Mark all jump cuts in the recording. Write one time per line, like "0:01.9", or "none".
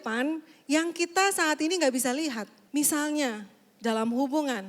0:02.6